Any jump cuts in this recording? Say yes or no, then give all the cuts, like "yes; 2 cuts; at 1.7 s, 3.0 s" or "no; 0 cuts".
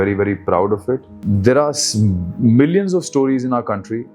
yes; 1 cut; at 1.1 s